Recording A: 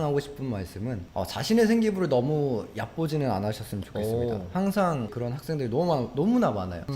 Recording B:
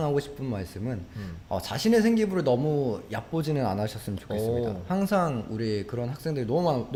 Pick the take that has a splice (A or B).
A